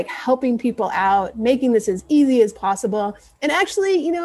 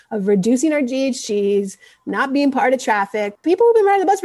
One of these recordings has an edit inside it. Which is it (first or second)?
second